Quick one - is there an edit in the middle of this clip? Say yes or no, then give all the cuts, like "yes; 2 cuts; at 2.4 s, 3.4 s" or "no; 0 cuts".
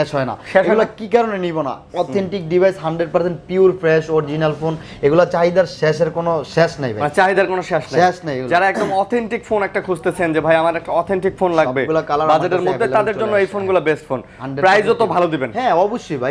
no; 0 cuts